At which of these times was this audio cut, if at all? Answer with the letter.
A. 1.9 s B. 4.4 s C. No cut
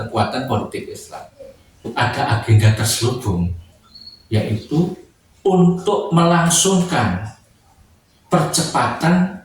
A